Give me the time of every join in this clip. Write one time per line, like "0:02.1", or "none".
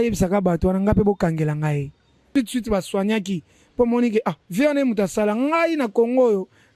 0:02.1